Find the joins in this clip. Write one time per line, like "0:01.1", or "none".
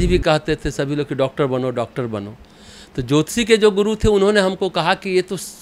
none